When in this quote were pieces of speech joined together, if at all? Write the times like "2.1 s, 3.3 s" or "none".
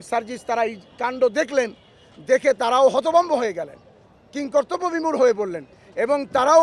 none